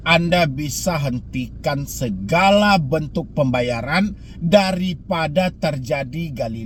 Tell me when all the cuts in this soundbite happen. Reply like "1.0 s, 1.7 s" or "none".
none